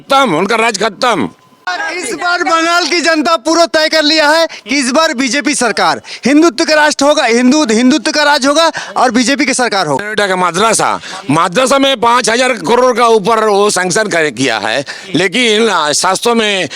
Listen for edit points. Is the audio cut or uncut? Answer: cut